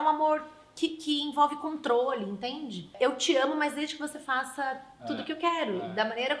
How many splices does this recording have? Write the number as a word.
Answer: one